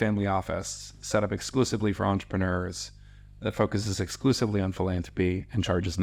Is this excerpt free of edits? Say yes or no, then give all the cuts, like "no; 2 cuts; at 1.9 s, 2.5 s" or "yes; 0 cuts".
yes; 0 cuts